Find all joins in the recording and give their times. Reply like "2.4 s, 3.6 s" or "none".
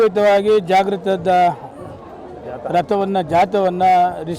none